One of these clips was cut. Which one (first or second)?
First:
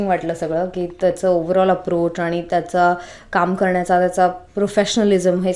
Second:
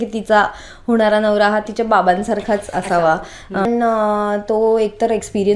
second